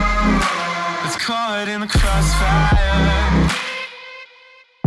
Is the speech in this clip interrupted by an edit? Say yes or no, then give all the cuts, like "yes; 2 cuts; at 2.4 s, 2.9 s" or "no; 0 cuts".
yes; 1 cut; at 1.0 s